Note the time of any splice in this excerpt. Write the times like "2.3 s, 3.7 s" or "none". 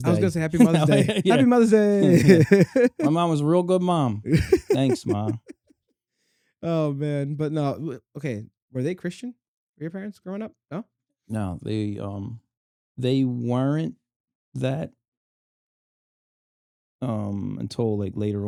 none